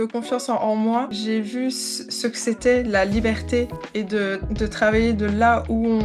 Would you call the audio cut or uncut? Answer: cut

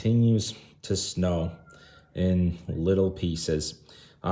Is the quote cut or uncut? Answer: uncut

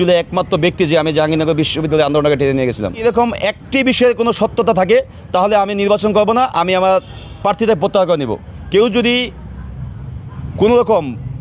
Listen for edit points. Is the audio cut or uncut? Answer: cut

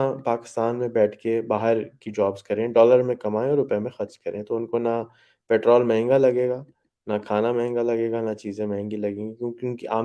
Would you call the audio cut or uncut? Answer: uncut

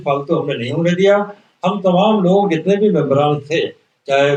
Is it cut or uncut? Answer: uncut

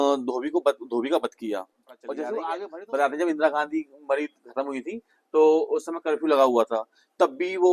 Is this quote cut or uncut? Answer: cut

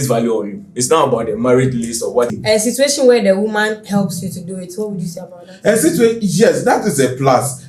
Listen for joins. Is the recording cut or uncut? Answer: cut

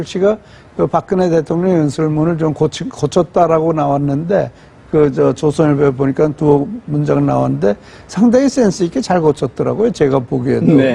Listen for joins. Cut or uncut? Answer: uncut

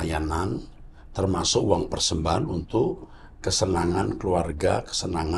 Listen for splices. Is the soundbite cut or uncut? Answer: uncut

